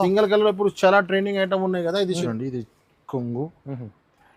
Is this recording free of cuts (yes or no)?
no